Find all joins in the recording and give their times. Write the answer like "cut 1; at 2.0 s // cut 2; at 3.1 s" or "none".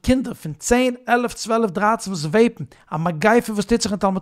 none